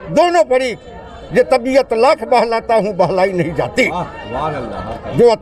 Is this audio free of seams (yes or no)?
yes